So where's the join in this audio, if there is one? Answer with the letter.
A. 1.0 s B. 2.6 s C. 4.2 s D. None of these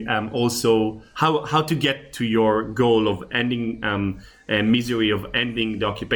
A